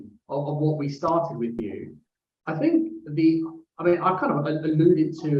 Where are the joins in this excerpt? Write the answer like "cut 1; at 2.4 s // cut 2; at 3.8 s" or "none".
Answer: none